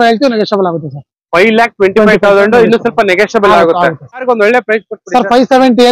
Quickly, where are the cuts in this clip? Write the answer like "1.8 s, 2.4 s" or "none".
4.2 s